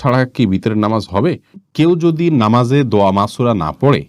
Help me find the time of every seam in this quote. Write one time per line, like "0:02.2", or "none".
0:01.6